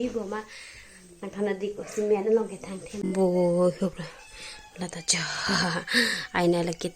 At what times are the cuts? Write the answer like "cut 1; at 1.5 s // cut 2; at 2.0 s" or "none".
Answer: cut 1; at 3.0 s